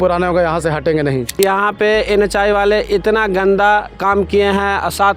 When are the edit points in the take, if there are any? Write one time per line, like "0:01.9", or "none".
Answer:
0:01.3